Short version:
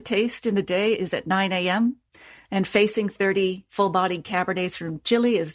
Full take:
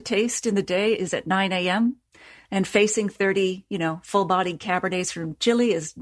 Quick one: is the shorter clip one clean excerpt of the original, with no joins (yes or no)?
no